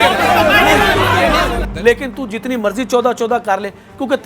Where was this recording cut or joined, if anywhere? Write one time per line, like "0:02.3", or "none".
0:01.6